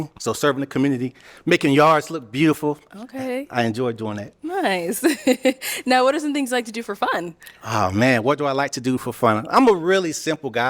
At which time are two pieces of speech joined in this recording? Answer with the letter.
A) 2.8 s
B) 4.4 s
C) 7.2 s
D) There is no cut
D